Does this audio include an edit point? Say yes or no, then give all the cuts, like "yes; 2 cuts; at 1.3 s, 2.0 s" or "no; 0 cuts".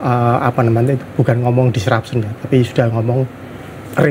no; 0 cuts